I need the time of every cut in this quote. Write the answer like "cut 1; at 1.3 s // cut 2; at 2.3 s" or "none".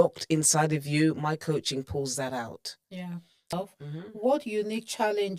cut 1; at 3.5 s